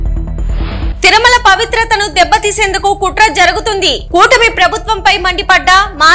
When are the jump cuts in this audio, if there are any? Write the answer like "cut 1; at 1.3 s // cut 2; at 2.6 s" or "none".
cut 1; at 0.9 s